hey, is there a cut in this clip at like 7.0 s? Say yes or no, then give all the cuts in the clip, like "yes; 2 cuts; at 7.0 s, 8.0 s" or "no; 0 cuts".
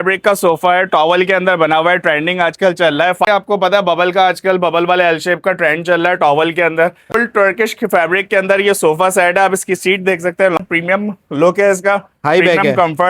yes; 3 cuts; at 3.3 s, 7.0 s, 10.6 s